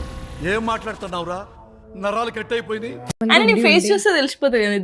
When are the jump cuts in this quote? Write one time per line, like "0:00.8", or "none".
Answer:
0:03.2